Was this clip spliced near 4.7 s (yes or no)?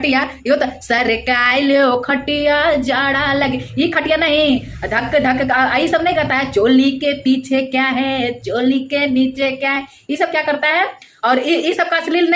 no